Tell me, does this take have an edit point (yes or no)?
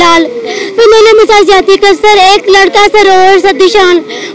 no